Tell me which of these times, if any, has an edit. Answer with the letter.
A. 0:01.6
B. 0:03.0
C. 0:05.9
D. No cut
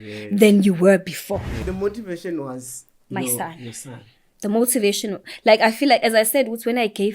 A